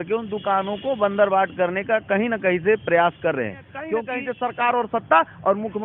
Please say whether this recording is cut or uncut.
cut